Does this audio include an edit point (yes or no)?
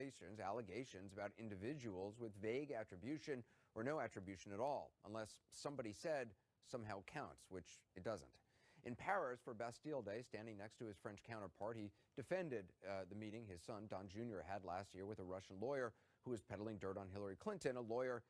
yes